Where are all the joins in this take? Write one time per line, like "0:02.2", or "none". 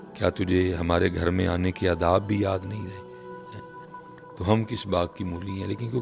none

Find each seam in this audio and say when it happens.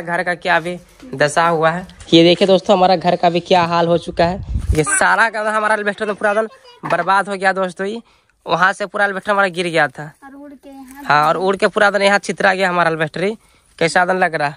0:01.9
0:04.6

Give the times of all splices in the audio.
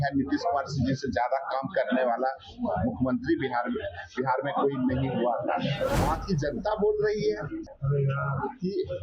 0:06.0
0:07.7

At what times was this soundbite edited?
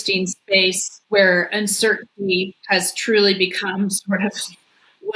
0:00.9
0:02.6

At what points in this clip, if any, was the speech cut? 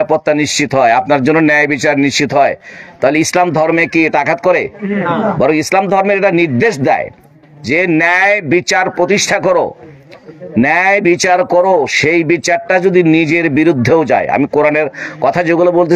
none

